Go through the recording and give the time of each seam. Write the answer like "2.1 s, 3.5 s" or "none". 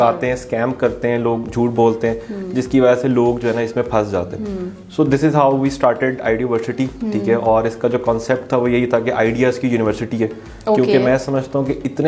none